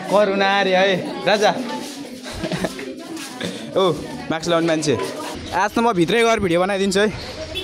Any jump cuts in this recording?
yes; 1 cut; at 5.3 s

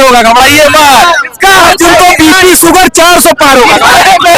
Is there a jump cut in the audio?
no; 0 cuts

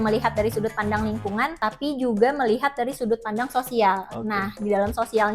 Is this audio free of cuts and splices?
no; 1 cut; at 1.6 s

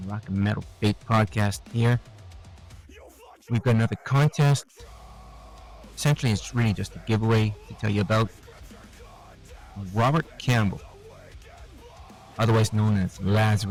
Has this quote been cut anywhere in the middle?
no; 0 cuts

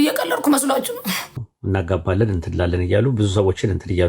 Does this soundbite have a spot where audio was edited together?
yes; 1 cut; at 1.4 s

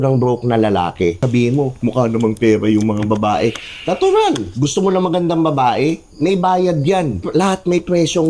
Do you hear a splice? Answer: yes; 2 cuts; at 1.2 s, 7.2 s

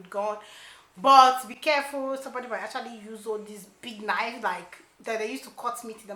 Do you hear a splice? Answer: no; 0 cuts

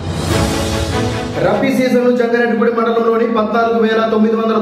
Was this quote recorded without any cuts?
no; 1 cut; at 1.3 s

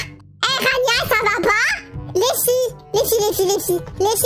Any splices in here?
yes; 1 cut; at 1.9 s

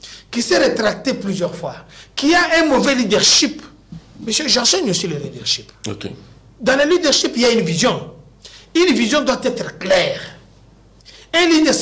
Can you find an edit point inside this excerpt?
no; 0 cuts

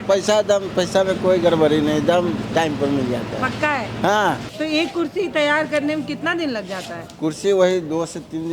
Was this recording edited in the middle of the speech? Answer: no; 0 cuts

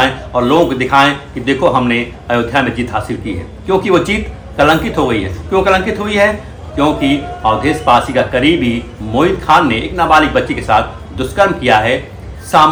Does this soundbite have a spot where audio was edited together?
no; 0 cuts

